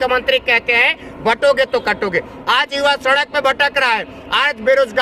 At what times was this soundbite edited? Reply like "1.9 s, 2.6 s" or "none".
2.3 s